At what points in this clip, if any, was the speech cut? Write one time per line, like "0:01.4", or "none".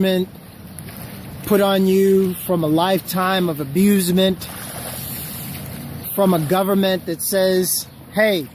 0:01.9